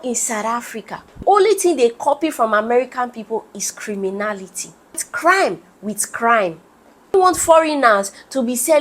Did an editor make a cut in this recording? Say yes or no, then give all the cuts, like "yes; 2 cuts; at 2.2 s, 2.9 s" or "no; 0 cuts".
yes; 3 cuts; at 1.0 s, 5.1 s, 7.1 s